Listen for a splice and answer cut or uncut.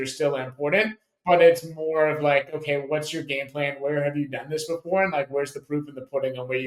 uncut